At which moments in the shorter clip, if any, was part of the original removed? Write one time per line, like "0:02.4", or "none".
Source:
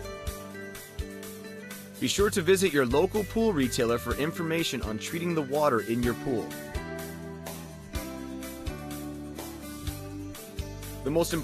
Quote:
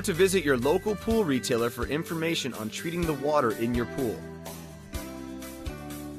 0:04.2